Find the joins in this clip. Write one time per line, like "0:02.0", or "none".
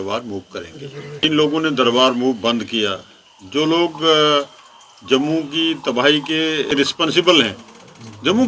0:01.2
0:06.7